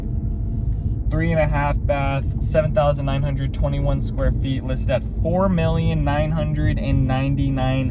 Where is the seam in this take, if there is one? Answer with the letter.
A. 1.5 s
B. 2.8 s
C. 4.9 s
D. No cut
D